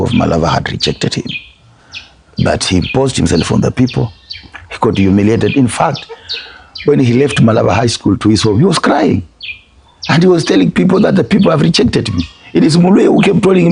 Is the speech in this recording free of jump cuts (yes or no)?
yes